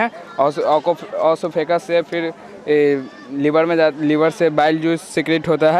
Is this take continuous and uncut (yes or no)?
yes